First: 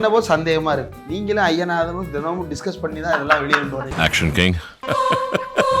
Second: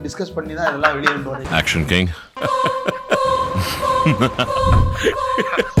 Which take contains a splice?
first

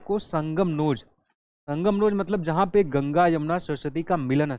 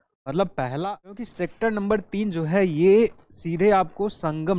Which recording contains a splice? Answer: second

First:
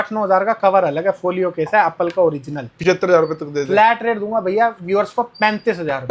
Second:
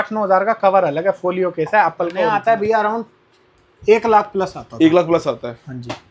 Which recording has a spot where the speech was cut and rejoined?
second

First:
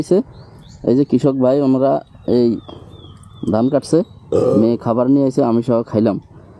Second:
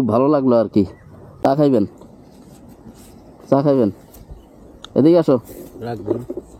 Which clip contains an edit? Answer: second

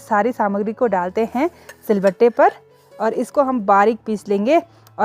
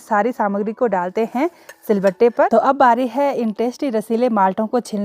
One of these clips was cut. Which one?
second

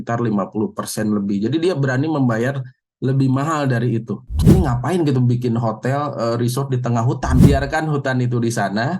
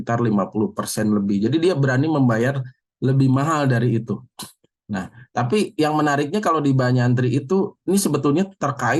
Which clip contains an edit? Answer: first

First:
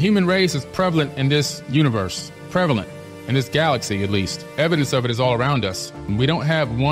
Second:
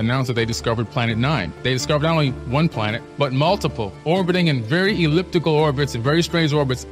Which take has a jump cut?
first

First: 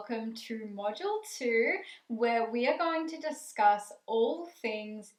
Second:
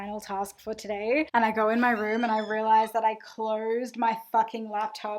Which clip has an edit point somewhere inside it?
second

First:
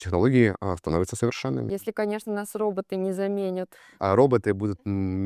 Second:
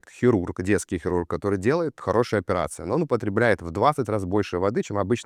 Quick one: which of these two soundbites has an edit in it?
first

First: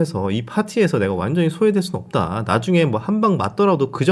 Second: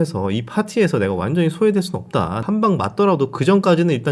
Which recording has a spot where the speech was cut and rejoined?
second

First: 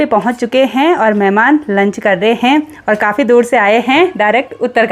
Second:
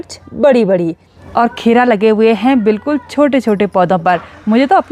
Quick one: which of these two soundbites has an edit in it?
second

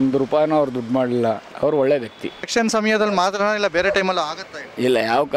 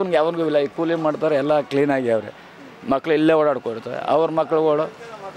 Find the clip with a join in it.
first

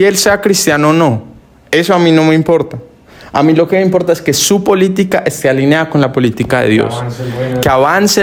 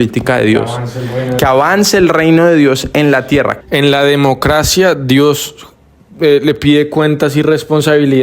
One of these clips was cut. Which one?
second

